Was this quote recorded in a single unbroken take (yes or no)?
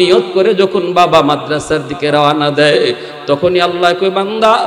no